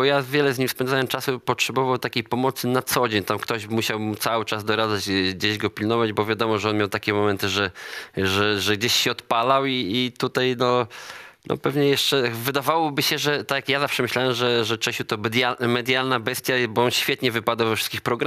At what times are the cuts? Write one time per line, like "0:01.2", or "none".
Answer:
none